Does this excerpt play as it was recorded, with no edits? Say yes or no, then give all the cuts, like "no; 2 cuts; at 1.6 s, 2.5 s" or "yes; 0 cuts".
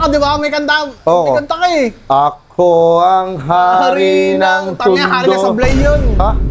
yes; 0 cuts